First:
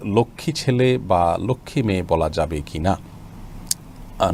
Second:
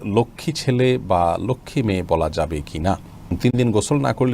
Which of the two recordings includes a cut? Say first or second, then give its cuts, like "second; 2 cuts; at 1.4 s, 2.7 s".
second; 1 cut; at 3.3 s